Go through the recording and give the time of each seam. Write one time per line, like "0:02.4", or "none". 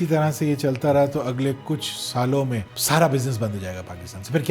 0:02.7